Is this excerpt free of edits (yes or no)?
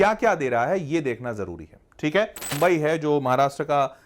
no